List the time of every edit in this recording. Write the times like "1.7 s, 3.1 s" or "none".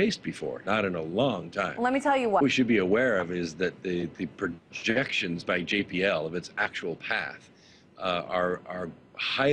2.4 s